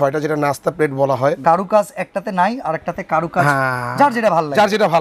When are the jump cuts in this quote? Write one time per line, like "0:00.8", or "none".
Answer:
0:01.4